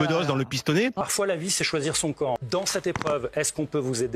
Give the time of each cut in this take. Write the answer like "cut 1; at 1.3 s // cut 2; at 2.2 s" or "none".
cut 1; at 1.0 s // cut 2; at 2.4 s